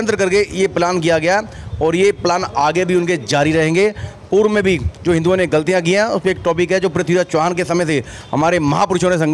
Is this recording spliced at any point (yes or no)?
no